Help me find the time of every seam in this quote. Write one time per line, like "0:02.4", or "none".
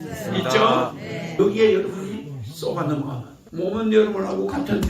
0:01.4
0:03.3